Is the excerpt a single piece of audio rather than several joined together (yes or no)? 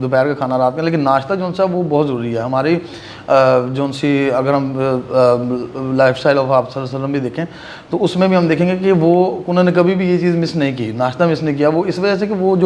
yes